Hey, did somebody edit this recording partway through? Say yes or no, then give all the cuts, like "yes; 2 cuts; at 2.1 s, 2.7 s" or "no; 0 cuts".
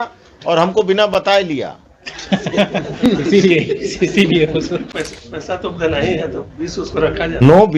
yes; 1 cut; at 4.9 s